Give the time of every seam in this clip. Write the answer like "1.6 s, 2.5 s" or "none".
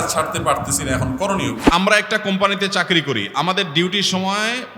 1.6 s